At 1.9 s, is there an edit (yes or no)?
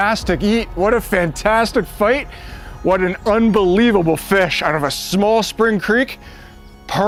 no